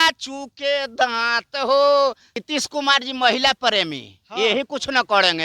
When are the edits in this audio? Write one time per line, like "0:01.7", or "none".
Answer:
0:02.3